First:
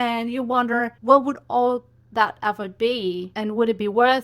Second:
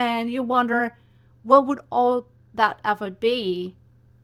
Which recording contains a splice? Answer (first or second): first